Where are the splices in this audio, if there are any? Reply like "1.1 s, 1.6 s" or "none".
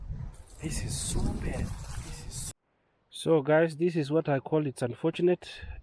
2.5 s